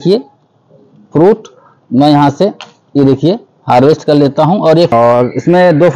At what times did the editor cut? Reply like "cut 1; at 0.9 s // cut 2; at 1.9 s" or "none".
cut 1; at 4.9 s